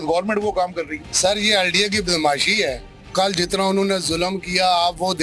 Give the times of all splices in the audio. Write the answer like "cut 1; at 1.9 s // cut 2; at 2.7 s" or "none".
cut 1; at 1.0 s